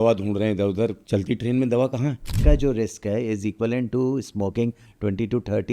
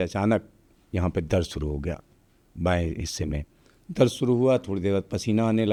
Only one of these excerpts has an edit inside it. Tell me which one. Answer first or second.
first